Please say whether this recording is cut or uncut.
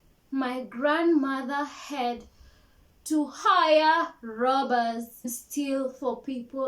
cut